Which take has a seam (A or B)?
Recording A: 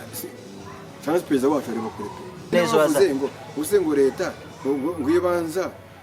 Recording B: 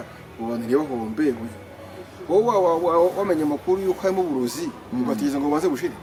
A